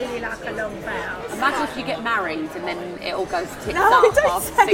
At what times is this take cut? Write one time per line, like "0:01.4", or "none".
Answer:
0:01.2